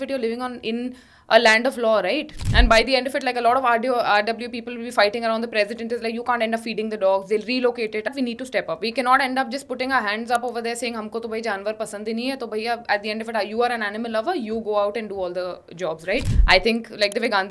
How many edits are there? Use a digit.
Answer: 3